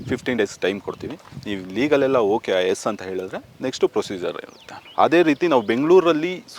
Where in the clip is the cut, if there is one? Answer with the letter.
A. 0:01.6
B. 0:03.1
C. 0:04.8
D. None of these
C